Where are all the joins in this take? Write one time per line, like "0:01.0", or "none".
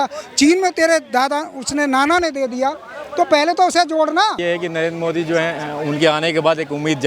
0:04.4